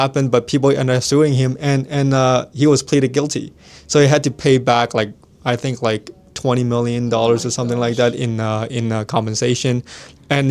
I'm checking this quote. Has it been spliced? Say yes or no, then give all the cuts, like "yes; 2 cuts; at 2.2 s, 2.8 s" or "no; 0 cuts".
no; 0 cuts